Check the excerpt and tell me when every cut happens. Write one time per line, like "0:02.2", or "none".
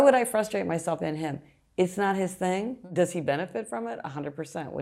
0:02.8